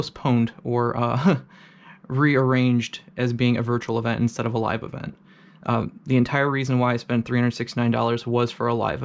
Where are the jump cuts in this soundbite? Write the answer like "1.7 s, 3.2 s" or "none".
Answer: none

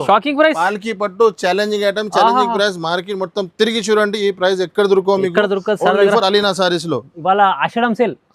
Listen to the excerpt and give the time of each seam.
none

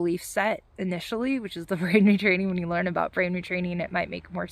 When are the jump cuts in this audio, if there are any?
none

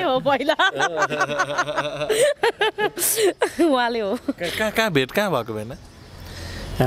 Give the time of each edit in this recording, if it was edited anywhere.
none

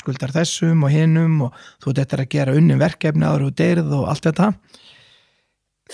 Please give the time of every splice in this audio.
none

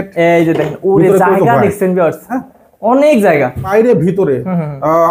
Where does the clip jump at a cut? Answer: 3.7 s

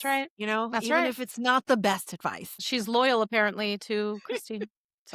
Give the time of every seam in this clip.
2.5 s

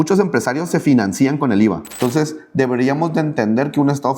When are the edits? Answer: 1.9 s

